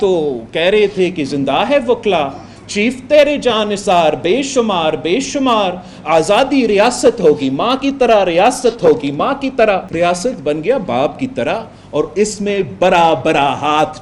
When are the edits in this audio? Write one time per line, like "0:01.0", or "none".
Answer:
0:09.9